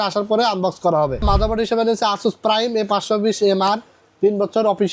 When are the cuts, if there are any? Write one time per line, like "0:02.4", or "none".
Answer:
0:01.2